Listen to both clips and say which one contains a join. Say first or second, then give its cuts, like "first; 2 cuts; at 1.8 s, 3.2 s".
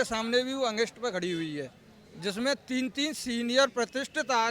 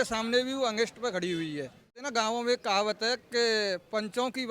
second; 1 cut; at 2.0 s